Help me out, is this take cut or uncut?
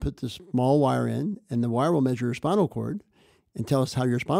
uncut